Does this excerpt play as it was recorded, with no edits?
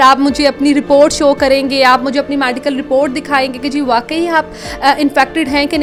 yes; 0 cuts

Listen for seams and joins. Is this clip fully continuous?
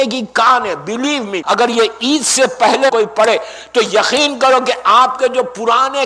no; 2 cuts; at 1.4 s, 2.9 s

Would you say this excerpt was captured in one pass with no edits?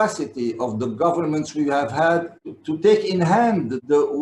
no; 1 cut; at 2.4 s

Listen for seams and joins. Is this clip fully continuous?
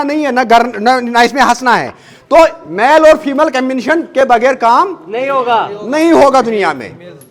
yes; 0 cuts

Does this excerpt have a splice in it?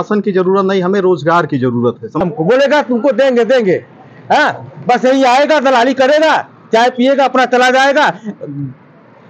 yes; 1 cut; at 2.2 s

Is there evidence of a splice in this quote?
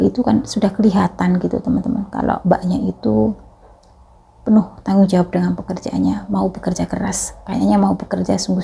no; 0 cuts

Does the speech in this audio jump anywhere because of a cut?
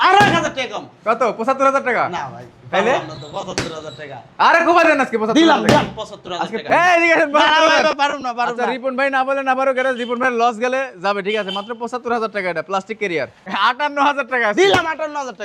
yes; 2 cuts; at 6.6 s, 13.4 s

